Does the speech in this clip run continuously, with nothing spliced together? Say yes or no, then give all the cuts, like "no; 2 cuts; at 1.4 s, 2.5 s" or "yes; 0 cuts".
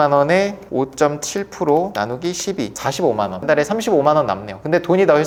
yes; 0 cuts